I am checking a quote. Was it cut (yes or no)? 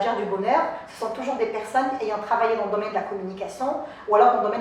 no